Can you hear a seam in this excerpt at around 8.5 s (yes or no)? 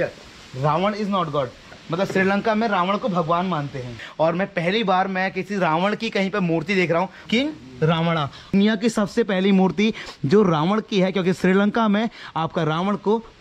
yes